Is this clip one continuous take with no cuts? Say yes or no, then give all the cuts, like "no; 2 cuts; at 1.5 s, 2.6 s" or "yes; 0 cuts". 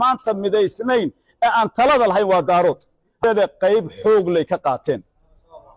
no; 1 cut; at 3.1 s